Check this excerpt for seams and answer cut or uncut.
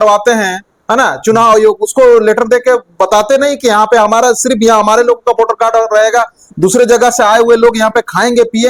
uncut